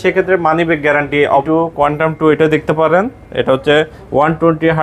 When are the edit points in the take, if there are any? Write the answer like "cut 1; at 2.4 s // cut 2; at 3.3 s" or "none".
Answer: cut 1; at 1.4 s